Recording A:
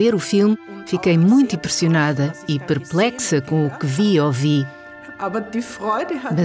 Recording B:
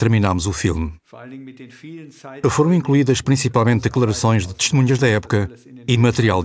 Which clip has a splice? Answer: A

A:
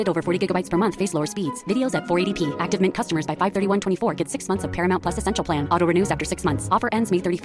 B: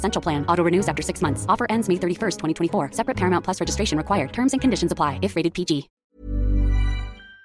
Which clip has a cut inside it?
B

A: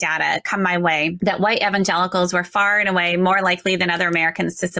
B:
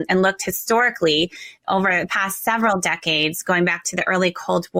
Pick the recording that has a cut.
A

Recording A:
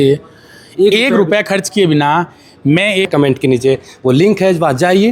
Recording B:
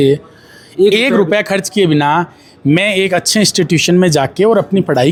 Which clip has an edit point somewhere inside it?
A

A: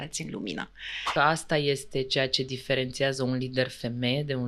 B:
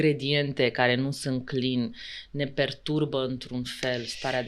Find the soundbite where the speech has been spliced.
A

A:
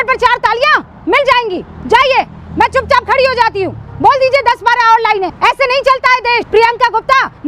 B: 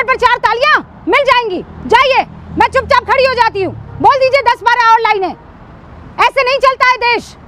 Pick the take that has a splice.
A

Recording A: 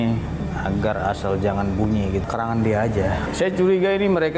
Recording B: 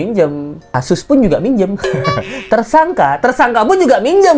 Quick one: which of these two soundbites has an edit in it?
A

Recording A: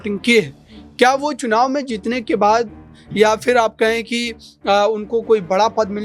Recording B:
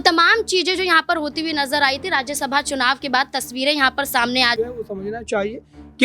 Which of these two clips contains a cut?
B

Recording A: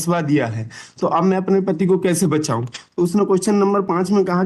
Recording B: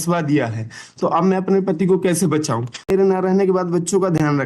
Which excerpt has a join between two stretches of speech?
B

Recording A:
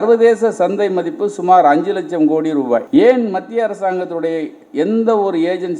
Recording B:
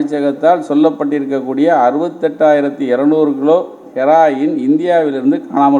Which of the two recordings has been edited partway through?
A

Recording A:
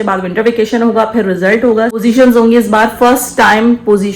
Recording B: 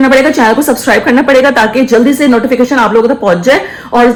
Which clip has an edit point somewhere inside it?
A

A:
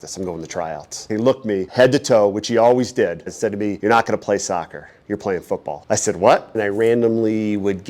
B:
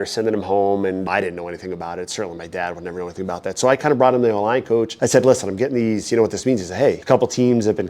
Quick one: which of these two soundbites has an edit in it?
A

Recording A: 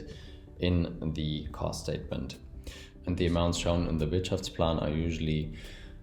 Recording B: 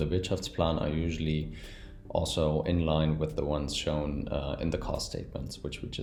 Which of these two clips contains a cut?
A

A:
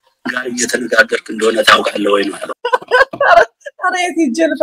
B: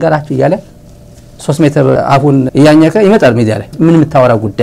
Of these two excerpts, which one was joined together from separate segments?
B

